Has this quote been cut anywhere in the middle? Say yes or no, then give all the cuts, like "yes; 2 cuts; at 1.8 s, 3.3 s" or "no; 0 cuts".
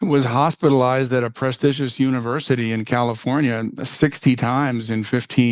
no; 0 cuts